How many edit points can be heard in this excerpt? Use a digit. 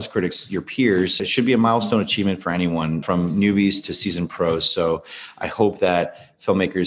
2